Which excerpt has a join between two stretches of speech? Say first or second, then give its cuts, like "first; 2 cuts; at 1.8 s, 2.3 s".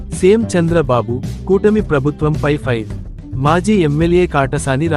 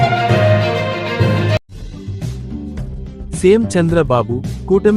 second; 2 cuts; at 0.8 s, 1.7 s